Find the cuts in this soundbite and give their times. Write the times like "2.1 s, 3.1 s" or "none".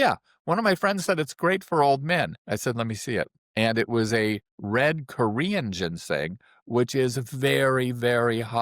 2.4 s, 3.4 s